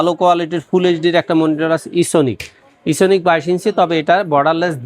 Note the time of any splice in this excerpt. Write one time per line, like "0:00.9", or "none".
none